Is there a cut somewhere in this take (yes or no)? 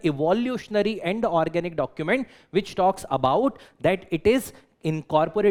no